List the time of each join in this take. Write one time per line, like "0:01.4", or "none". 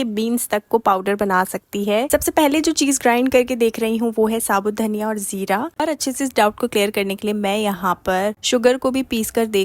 0:02.1
0:05.8